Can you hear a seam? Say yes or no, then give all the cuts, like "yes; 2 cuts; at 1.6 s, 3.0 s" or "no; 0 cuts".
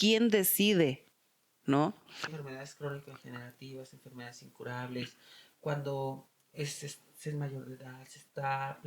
yes; 1 cut; at 2.3 s